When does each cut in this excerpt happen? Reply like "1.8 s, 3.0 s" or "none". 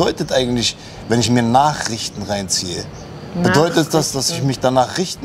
none